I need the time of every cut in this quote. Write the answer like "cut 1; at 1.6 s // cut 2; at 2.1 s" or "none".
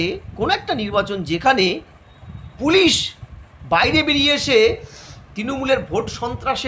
none